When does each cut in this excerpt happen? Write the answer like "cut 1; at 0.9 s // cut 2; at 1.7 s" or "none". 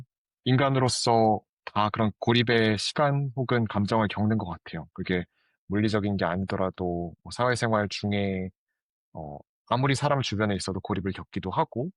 none